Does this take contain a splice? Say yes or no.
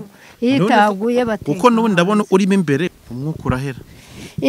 yes